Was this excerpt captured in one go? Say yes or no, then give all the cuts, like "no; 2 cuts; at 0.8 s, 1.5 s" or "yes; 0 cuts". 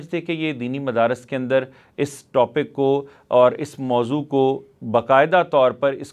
yes; 0 cuts